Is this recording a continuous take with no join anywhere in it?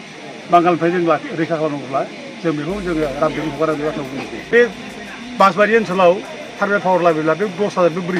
no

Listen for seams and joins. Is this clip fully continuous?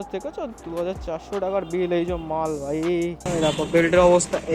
no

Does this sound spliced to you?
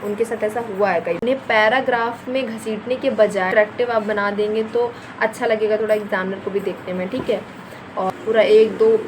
yes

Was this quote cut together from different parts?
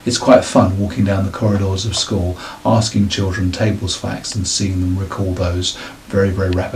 no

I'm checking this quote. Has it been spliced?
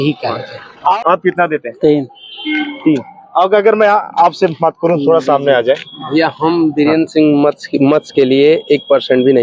yes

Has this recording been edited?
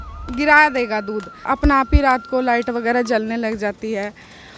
yes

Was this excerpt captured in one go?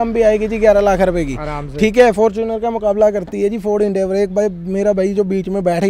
yes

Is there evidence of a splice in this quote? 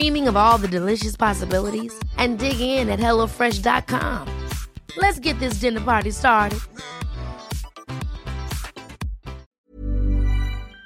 yes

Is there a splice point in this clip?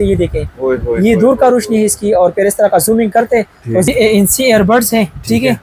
yes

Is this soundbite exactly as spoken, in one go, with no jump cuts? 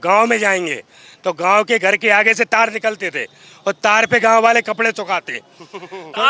yes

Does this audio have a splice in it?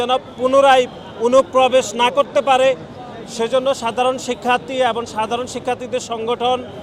no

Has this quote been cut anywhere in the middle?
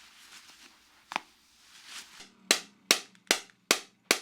yes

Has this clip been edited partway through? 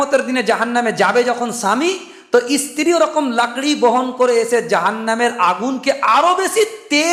no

